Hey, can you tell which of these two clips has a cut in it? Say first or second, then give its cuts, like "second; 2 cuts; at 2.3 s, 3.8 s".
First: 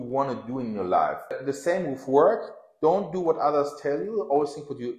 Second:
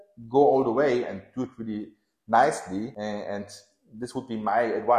first; 1 cut; at 1.4 s